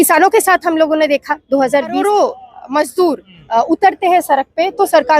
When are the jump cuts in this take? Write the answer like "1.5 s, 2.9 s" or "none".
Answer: 2.0 s